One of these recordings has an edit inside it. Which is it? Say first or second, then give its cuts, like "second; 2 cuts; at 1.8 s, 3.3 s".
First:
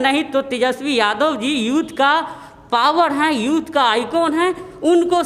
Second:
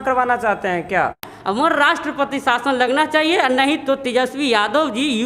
second; 1 cut; at 1.3 s